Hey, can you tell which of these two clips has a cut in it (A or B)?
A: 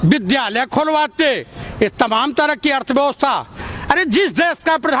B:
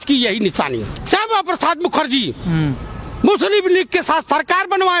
B